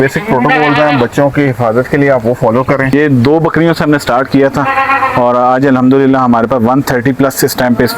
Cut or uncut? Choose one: cut